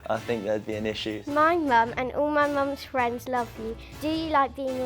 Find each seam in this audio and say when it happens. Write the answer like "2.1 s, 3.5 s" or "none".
1.2 s, 3.8 s